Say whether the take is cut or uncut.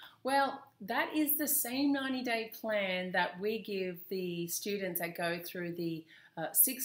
uncut